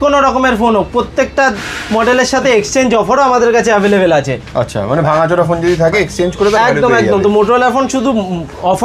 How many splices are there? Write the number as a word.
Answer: zero